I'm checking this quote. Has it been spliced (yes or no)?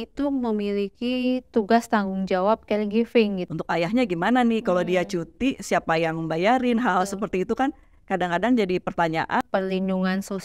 yes